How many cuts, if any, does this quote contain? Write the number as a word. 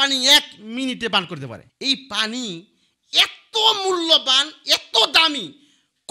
one